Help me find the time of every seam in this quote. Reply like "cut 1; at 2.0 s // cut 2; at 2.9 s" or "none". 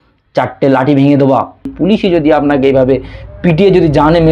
cut 1; at 1.7 s